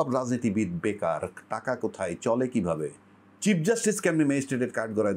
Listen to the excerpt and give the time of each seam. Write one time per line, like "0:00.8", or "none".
0:03.3